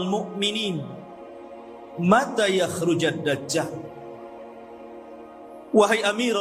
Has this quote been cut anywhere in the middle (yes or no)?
yes